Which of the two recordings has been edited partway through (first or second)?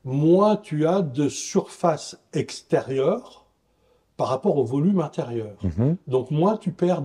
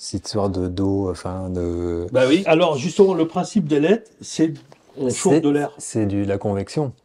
second